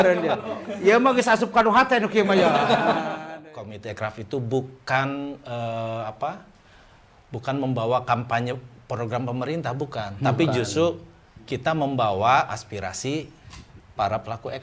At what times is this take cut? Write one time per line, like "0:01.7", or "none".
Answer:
0:03.2